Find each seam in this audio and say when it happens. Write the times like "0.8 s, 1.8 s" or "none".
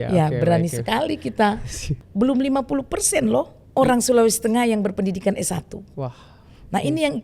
1.9 s, 3.6 s